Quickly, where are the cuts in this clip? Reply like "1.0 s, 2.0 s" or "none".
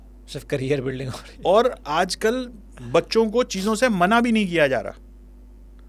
none